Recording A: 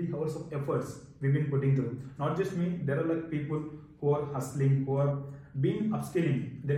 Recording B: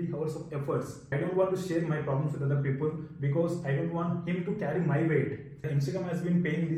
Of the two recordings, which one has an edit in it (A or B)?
B